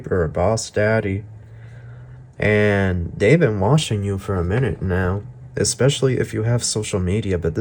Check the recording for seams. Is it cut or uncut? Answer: uncut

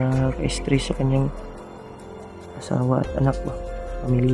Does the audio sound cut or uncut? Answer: uncut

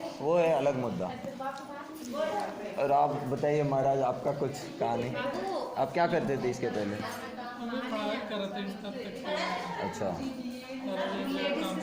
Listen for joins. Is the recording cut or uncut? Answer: uncut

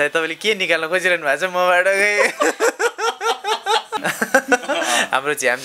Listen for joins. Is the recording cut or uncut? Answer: cut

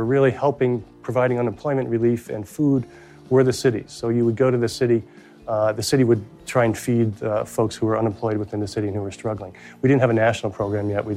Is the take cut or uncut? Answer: uncut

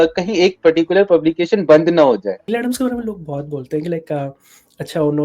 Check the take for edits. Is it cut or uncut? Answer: cut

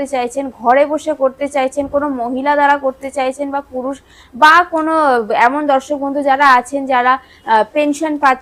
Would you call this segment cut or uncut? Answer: uncut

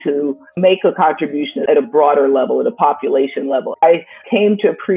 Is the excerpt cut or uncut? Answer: cut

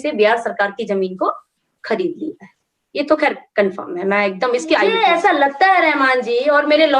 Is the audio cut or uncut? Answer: cut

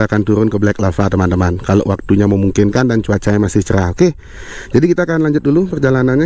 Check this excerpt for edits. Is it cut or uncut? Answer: uncut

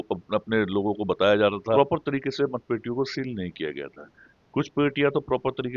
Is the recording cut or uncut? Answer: cut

